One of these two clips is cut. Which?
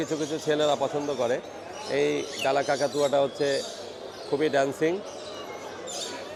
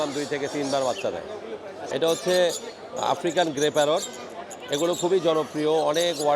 second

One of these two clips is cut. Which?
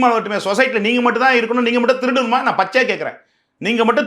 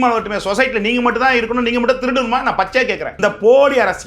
second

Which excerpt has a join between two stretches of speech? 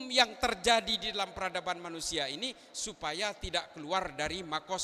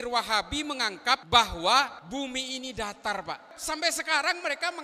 second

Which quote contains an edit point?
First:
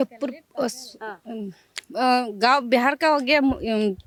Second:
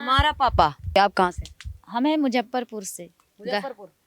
second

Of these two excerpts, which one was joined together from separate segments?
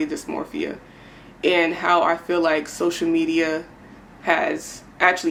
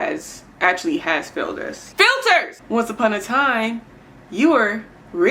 second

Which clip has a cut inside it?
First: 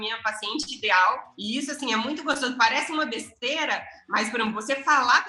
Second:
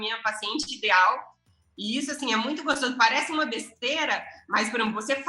first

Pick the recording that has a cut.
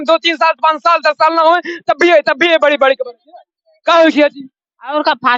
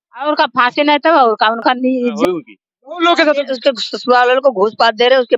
second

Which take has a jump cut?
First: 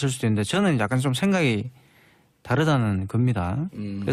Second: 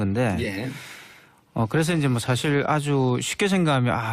second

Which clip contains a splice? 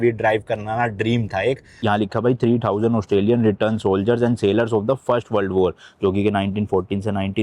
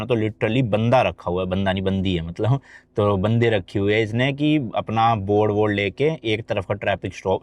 first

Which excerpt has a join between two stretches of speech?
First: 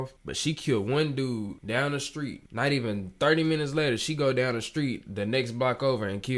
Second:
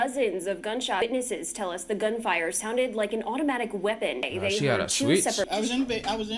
second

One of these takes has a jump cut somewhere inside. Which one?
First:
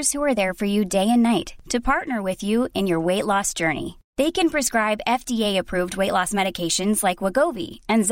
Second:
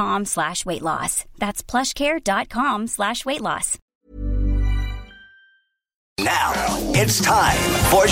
second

